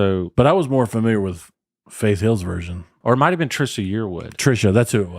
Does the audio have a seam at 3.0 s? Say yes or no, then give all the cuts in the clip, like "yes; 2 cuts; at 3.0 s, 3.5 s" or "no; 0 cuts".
yes; 1 cut; at 3.0 s